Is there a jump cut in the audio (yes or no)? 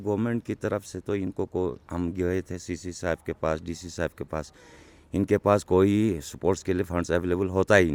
no